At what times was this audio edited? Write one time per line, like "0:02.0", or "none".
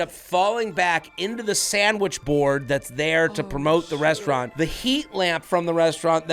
0:02.2
0:04.5

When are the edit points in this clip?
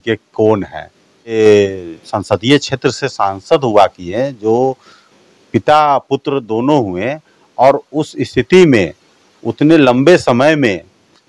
0:01.3

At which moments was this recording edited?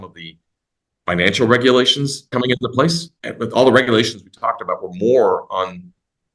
0:02.3
0:03.1

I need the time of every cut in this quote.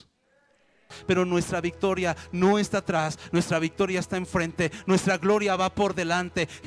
0:00.9

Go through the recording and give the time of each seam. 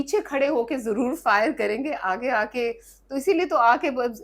none

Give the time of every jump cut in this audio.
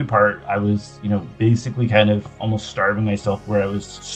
none

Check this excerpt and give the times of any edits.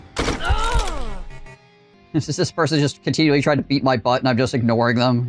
0:01.9

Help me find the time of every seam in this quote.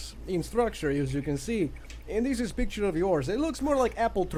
none

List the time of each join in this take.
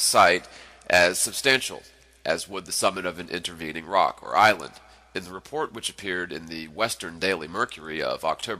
none

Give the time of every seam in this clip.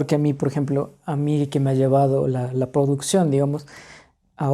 none

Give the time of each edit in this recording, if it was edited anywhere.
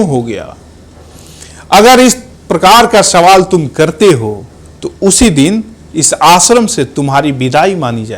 none

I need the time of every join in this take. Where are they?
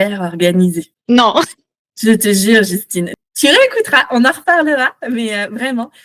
0:03.2

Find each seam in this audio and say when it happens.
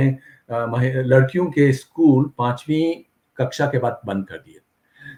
none

